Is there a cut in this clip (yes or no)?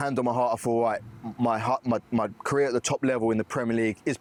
no